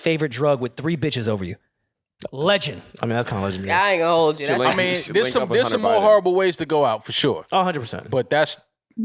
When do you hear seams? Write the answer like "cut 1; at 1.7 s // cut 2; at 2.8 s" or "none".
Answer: none